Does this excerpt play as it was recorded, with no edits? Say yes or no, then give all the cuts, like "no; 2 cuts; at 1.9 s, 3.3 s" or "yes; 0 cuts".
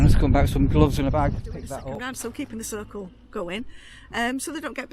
no; 1 cut; at 1.8 s